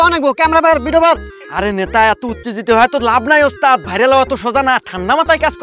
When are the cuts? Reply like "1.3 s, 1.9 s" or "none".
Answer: none